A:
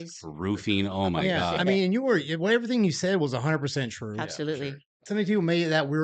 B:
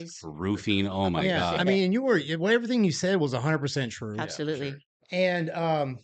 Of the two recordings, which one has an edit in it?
A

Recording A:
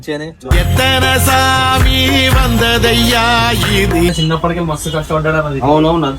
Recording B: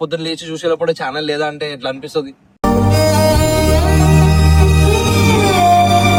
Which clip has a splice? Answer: A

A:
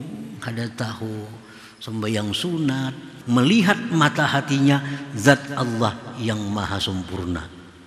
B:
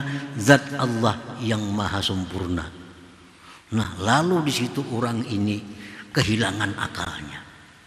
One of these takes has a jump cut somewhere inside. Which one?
A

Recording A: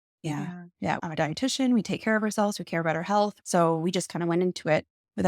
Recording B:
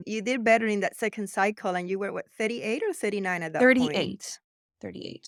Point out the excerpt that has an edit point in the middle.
A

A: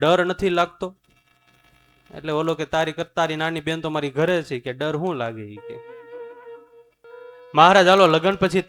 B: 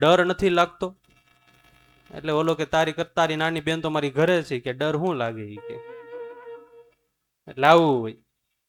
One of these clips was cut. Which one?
A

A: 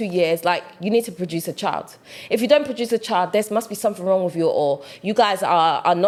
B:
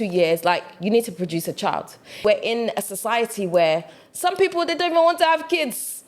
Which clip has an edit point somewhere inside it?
B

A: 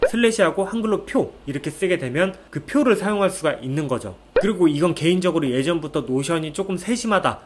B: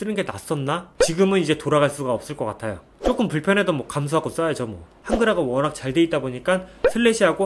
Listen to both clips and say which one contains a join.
B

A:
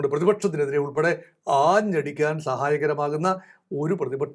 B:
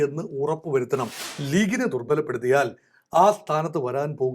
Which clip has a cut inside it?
B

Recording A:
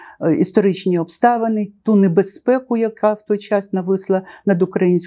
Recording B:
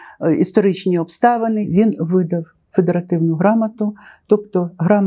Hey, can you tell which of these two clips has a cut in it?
B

